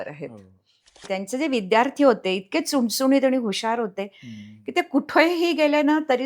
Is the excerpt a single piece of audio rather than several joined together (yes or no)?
no